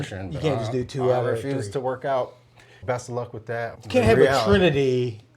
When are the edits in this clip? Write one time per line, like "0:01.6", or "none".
0:03.8